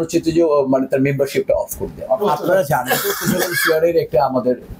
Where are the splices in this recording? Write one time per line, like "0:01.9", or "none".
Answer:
none